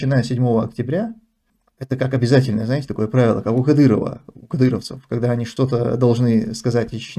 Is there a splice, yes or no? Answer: no